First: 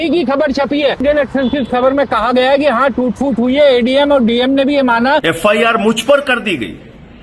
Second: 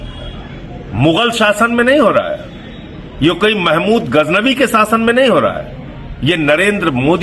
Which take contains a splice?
first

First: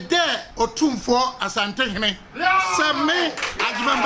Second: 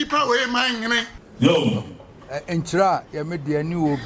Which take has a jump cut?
second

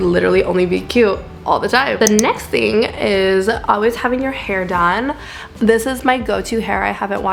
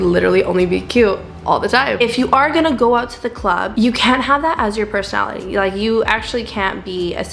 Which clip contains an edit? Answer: second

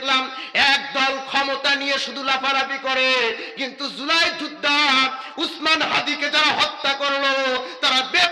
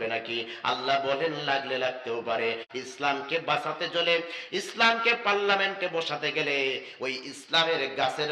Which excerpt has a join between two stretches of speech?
second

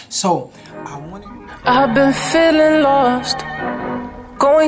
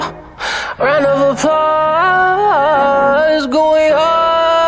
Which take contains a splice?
first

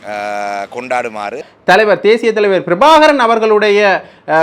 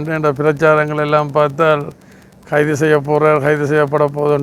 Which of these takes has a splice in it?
first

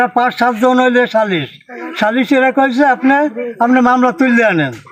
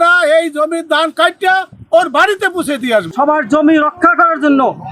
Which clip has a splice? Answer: second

